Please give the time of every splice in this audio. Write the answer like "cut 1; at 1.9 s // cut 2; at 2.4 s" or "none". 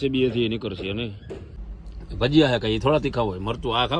cut 1; at 1.6 s